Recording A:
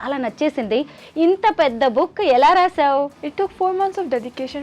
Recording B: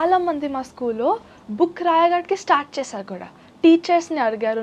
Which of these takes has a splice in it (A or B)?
A